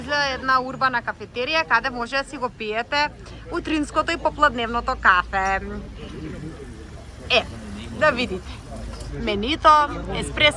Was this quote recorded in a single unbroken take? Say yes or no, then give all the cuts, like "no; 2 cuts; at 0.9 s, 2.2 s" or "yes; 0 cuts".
yes; 0 cuts